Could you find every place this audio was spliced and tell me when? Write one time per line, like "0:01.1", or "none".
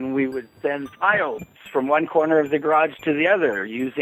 none